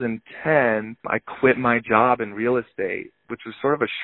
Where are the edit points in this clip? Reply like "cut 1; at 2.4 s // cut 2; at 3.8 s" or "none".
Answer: cut 1; at 1.0 s